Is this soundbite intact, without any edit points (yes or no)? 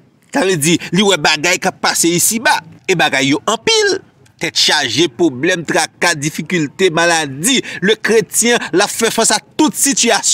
yes